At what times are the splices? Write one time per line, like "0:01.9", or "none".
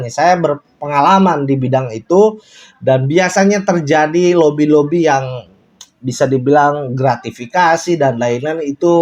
none